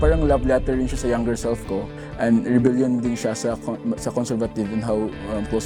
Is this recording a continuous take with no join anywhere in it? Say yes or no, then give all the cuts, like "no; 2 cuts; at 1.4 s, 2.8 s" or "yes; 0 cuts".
yes; 0 cuts